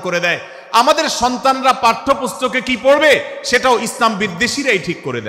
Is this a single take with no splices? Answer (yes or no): yes